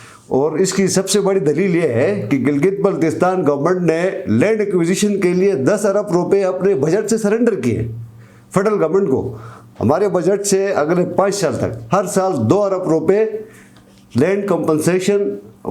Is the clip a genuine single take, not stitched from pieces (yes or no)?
yes